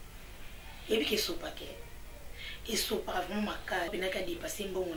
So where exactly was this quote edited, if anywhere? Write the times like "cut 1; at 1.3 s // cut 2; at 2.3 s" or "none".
cut 1; at 3.9 s